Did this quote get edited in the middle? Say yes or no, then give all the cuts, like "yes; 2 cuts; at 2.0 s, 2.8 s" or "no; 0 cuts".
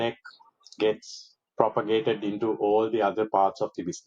no; 0 cuts